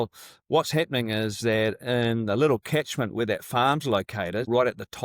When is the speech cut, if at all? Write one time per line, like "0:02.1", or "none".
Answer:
none